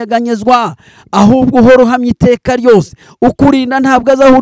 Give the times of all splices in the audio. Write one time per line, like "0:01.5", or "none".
0:03.0